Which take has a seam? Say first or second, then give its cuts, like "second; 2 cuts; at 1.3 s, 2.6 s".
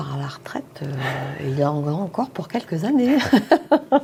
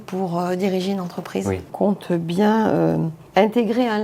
second; 2 cuts; at 1.7 s, 3.2 s